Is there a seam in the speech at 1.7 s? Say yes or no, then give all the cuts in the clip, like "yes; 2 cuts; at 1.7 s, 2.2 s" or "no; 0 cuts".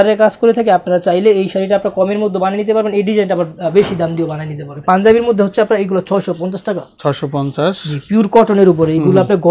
no; 1 cut; at 4.7 s